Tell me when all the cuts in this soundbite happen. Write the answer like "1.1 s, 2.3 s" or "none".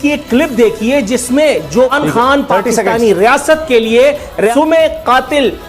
1.9 s, 4.5 s